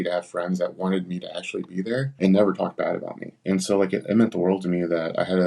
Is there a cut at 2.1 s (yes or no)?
yes